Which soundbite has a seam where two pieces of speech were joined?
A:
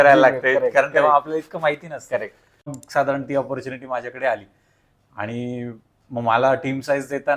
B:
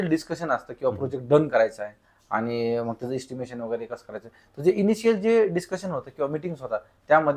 A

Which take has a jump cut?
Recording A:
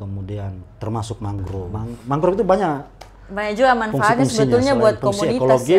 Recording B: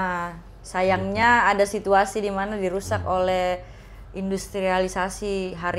A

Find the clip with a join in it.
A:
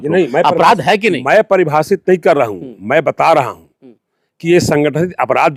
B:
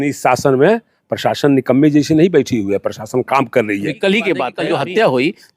B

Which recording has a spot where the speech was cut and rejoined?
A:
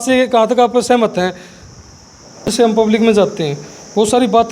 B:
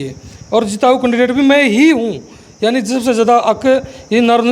A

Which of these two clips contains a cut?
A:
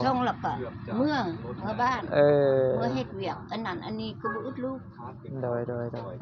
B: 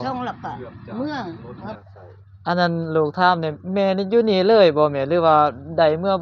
B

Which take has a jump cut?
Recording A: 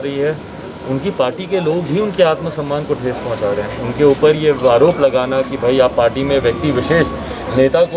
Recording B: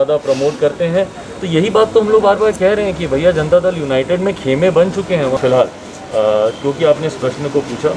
B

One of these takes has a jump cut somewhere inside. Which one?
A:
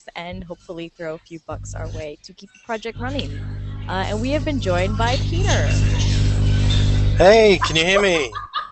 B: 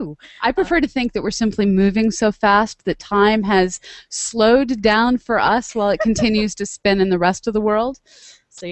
B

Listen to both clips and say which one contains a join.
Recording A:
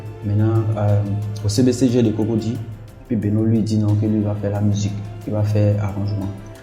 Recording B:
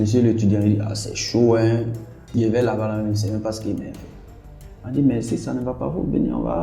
B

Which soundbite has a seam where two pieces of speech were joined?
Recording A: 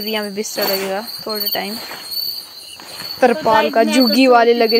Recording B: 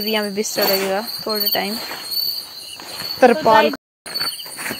B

